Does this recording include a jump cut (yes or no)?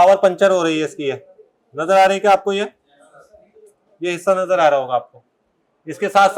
no